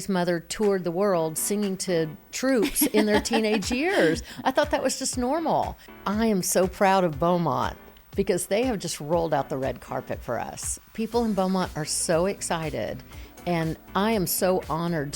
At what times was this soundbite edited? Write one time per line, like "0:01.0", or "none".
0:05.8